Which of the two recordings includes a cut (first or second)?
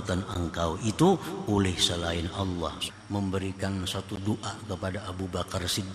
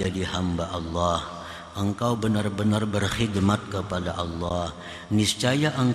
first